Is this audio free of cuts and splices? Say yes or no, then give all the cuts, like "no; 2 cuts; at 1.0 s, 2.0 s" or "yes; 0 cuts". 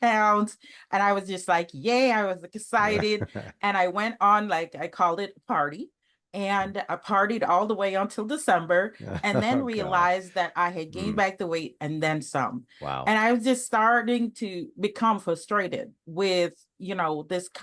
yes; 0 cuts